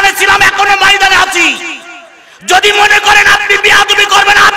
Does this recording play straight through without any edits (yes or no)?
yes